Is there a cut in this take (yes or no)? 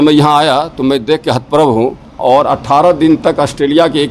yes